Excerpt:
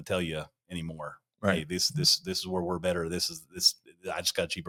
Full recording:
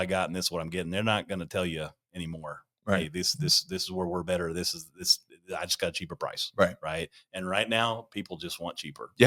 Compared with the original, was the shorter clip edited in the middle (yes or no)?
no